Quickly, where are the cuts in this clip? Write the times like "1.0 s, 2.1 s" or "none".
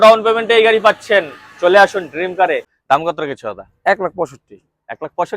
2.7 s